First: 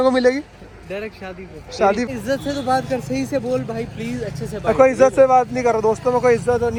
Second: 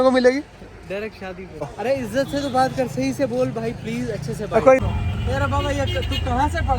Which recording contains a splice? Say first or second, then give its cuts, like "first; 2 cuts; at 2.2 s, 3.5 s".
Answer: second; 2 cuts; at 1.8 s, 4.8 s